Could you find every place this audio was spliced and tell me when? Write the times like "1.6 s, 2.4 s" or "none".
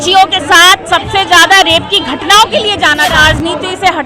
3.1 s